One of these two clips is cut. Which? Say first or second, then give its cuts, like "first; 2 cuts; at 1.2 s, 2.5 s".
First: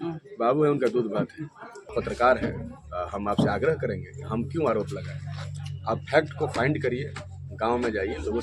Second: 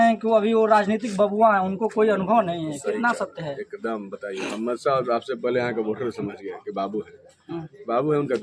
first; 1 cut; at 1.9 s